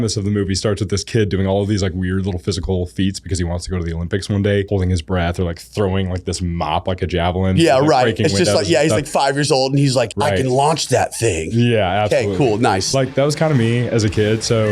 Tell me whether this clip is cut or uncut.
cut